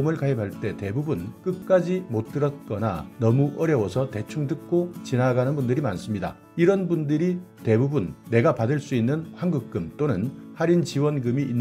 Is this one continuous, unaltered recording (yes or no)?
no